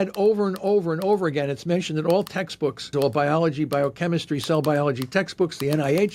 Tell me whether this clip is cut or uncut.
cut